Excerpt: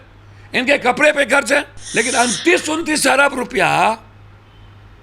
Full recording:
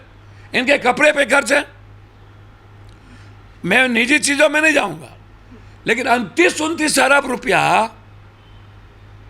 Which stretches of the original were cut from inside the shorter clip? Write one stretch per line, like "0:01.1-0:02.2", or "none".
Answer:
0:01.8-0:05.7

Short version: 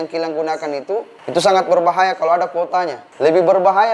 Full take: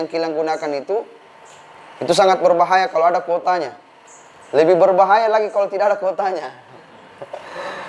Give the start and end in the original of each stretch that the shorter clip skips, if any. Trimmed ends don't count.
0:01.2-0:01.9
0:03.8-0:04.4

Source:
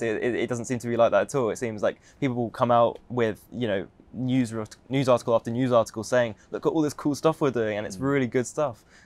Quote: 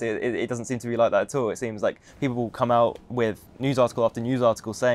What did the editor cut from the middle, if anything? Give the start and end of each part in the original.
0:03.5-0:04.8

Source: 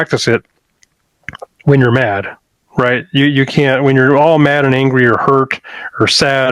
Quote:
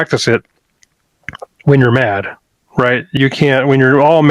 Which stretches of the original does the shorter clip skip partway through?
0:03.2-0:03.3

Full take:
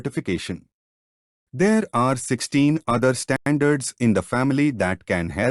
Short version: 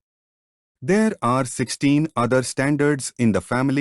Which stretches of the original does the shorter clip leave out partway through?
0:03.3-0:03.4

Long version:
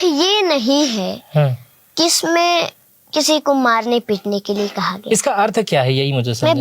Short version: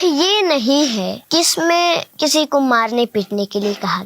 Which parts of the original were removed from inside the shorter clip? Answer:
0:01.2-0:01.8
0:02.7-0:03.0

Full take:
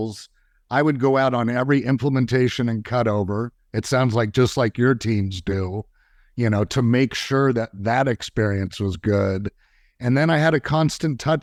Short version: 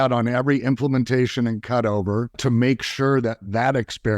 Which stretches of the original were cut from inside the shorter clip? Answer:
0:03.6-0:06.7

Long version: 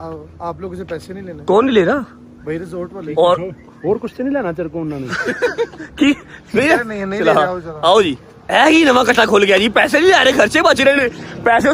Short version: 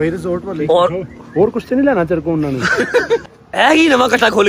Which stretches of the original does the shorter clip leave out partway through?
0:05.8-0:08.3

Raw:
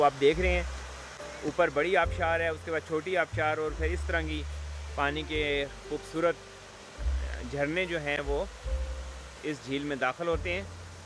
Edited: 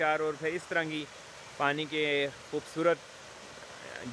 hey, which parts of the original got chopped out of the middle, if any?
none

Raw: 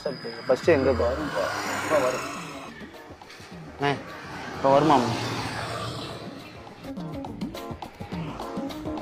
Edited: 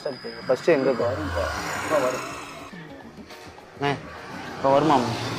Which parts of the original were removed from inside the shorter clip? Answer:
none

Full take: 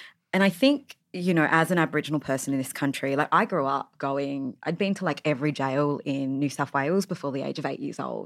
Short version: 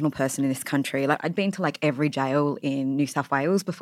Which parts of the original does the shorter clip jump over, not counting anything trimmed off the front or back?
0:03.3-0:04.6

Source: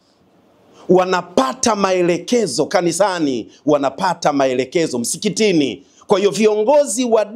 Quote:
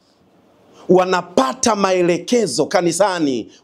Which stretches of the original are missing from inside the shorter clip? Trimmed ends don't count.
none

